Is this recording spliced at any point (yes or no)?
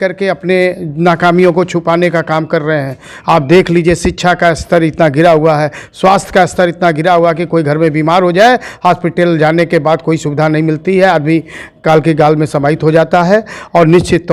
no